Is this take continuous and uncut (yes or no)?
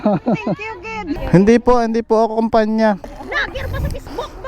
no